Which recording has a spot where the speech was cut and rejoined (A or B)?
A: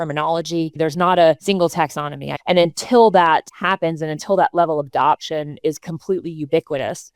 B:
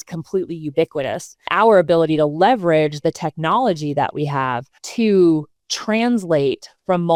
A